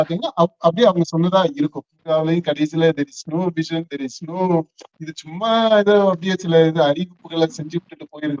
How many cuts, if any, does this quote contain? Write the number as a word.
one